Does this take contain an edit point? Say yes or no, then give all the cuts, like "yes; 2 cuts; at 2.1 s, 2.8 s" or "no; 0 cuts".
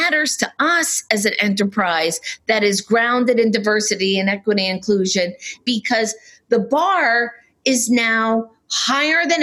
yes; 1 cut; at 5.6 s